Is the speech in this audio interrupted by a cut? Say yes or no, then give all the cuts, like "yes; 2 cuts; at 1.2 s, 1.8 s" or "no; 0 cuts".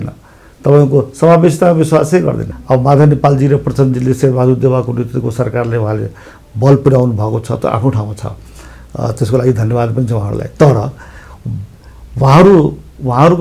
yes; 1 cut; at 2.5 s